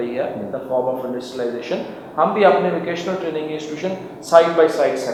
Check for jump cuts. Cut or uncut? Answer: uncut